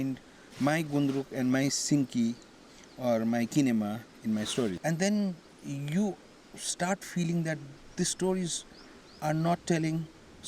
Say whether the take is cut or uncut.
cut